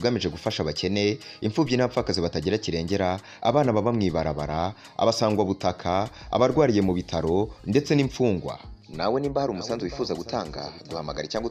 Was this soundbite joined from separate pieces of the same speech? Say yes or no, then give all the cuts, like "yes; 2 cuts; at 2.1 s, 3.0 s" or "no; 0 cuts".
no; 0 cuts